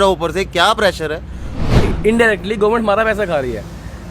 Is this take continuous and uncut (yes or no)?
no